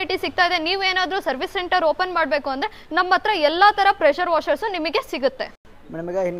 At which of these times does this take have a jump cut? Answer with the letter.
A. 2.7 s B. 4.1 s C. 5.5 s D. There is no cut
D